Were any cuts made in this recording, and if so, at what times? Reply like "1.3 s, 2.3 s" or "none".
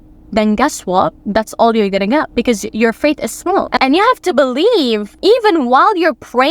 3.8 s

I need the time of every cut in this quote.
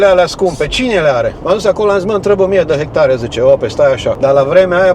1.4 s, 4.2 s

